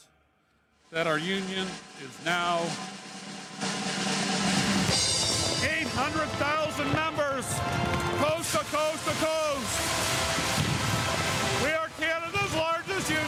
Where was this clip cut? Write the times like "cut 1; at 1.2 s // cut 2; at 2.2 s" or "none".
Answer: none

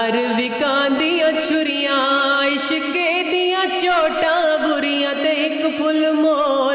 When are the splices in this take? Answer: none

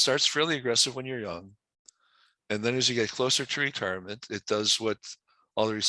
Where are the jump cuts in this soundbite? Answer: cut 1; at 1.6 s

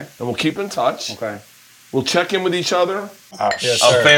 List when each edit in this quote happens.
cut 1; at 3.2 s

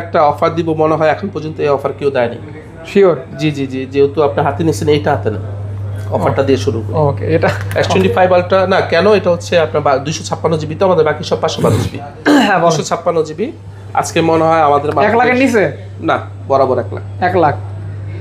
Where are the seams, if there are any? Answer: none

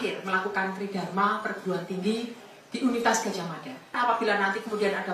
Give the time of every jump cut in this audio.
cut 1; at 4.0 s

